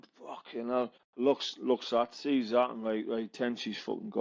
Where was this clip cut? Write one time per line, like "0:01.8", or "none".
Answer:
0:01.0